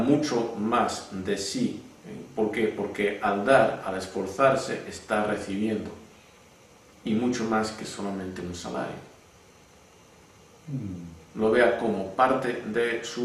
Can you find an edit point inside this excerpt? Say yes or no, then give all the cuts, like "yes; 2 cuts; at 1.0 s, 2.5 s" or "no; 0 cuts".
yes; 1 cut; at 4.7 s